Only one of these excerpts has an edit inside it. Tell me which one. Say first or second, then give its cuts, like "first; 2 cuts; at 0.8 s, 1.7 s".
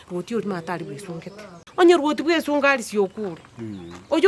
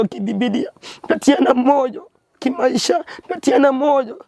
first; 1 cut; at 1.7 s